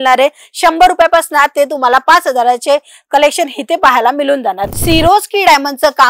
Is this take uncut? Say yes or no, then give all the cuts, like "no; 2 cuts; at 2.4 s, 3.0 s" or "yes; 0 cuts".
no; 1 cut; at 4.7 s